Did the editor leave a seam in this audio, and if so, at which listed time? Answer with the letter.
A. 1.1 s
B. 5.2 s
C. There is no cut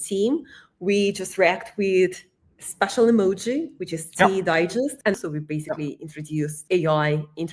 B